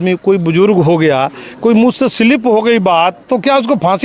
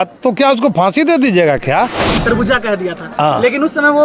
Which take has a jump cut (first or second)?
second